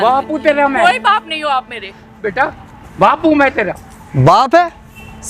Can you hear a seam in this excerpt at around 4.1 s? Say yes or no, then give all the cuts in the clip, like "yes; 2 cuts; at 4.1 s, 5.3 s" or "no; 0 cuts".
no; 1 cut; at 2.2 s